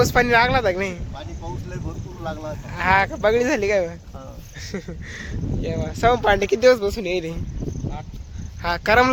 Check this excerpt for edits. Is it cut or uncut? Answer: uncut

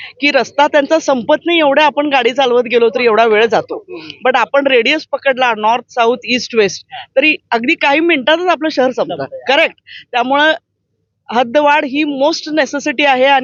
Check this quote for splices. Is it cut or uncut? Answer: uncut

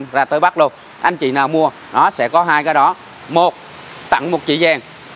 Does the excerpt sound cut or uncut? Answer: uncut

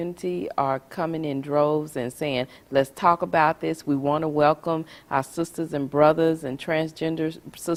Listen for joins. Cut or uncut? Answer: uncut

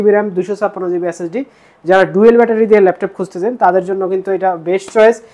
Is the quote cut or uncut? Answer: uncut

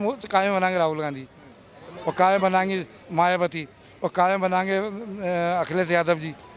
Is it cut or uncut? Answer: uncut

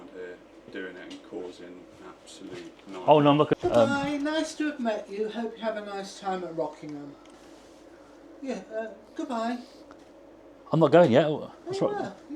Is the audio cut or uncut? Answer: cut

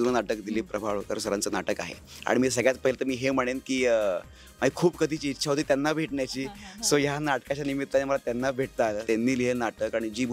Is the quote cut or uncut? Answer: cut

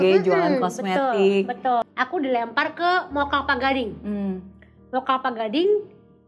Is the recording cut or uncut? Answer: cut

